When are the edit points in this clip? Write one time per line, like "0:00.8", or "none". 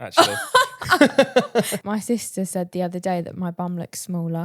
0:01.8